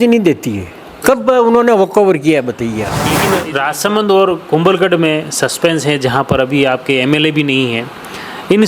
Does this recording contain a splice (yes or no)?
yes